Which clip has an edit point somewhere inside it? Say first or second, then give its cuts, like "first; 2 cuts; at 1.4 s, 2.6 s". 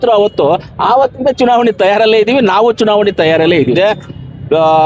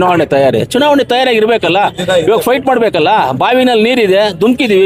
first; 1 cut; at 3.7 s